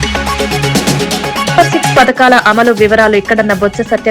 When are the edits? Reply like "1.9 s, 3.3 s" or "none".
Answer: none